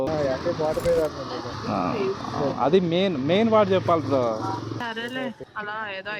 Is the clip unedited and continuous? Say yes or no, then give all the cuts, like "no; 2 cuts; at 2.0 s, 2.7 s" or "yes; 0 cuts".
no; 1 cut; at 4.8 s